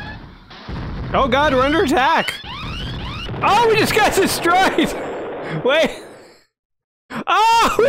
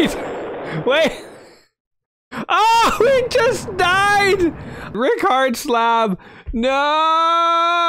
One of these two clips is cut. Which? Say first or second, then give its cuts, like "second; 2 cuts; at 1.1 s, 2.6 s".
second; 1 cut; at 4.9 s